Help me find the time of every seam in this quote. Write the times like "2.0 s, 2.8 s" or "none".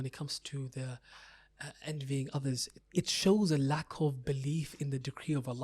2.8 s